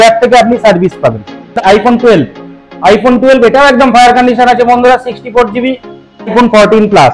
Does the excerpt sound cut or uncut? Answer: cut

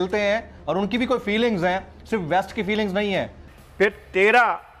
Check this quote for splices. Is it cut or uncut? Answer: cut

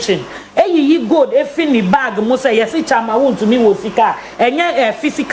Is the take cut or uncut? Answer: uncut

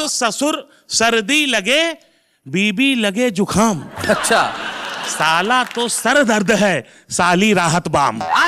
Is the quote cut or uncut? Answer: uncut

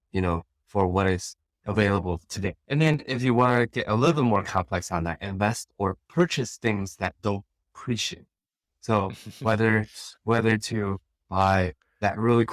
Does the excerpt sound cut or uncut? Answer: cut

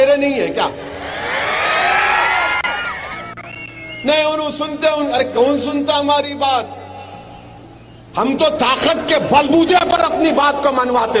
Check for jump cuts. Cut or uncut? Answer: uncut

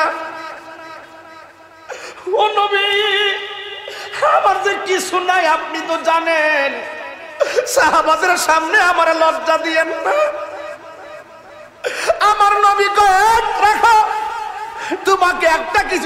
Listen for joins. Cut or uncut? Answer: uncut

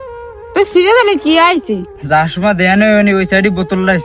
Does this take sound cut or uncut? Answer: cut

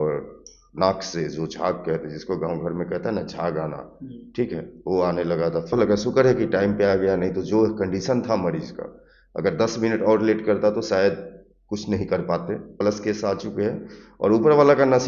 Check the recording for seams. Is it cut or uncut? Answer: cut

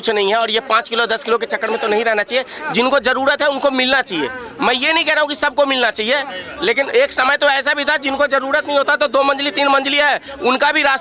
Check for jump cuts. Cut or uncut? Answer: uncut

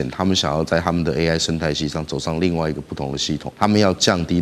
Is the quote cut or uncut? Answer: cut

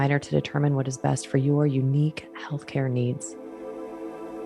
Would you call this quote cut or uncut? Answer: cut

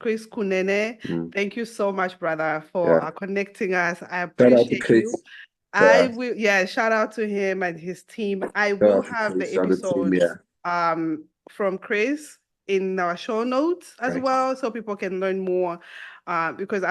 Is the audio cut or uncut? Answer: uncut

